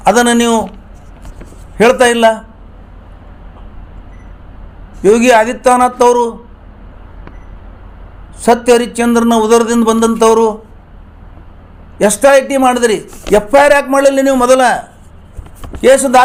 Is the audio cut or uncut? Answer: uncut